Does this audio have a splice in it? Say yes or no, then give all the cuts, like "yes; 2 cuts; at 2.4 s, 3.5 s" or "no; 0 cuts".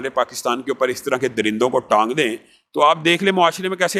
no; 0 cuts